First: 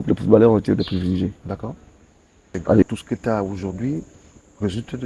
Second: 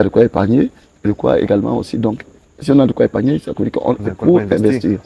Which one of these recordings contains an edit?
first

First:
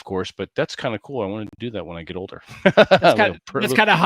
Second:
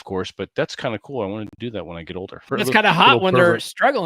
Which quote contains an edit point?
second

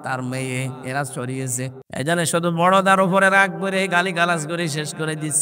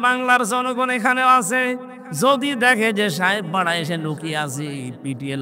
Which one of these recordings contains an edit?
first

